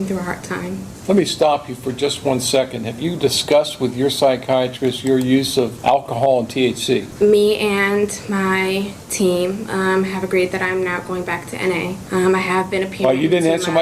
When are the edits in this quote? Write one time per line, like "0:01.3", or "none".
0:00.9
0:05.8
0:07.1
0:12.0